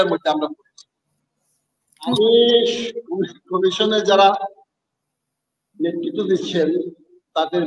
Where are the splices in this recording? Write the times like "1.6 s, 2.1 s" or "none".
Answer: none